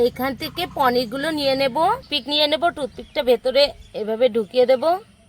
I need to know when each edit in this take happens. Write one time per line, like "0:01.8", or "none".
0:02.2